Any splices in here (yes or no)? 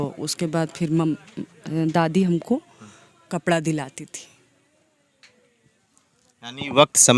no